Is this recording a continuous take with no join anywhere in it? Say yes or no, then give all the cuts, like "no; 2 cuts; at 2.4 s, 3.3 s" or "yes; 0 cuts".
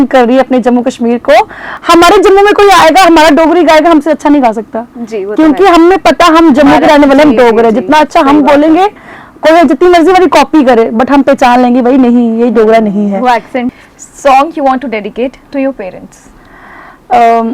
no; 2 cuts; at 1.7 s, 13.9 s